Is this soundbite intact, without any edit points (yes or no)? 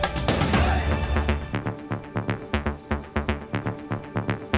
no